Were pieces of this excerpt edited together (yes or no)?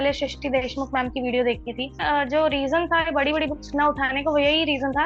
yes